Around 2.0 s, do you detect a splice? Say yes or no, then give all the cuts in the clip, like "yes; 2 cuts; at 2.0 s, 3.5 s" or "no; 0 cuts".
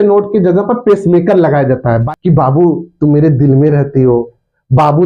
yes; 1 cut; at 2.0 s